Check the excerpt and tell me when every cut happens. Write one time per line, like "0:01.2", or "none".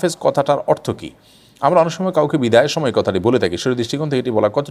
none